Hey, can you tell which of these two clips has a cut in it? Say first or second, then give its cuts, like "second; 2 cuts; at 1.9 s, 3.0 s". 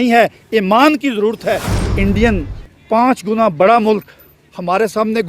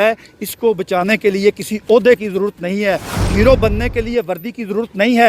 first; 1 cut; at 1.8 s